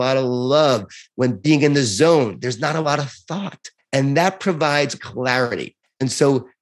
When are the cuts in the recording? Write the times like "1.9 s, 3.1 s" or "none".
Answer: 1.0 s, 5.0 s